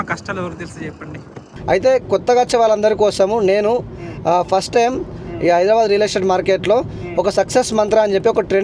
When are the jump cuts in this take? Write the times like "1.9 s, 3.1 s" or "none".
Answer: 1.5 s